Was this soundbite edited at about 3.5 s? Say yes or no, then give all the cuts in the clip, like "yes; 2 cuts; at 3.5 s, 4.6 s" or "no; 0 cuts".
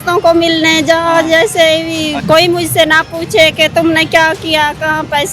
no; 1 cut; at 2.2 s